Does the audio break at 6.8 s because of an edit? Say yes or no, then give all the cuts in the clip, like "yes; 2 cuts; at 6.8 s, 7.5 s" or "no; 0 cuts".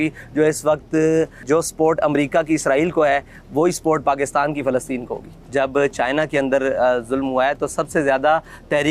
no; 2 cuts; at 1.4 s, 5.4 s